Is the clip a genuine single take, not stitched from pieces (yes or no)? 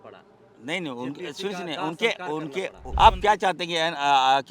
no